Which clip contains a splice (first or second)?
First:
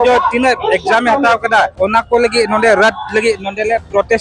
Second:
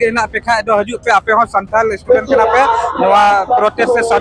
first